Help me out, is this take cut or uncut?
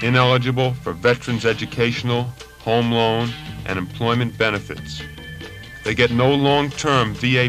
uncut